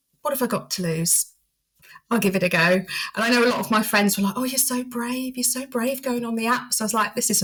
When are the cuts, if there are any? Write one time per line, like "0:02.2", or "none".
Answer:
none